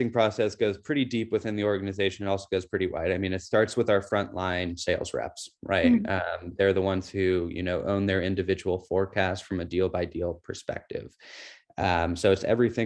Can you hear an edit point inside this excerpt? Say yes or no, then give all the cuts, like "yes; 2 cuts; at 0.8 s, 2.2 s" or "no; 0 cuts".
no; 0 cuts